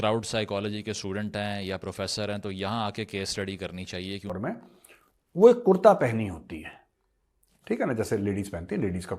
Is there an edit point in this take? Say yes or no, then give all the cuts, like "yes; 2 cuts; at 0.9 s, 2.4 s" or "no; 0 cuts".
yes; 1 cut; at 4.3 s